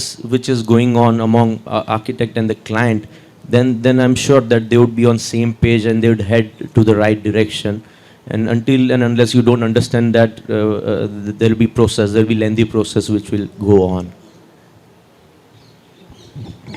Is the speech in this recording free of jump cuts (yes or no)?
yes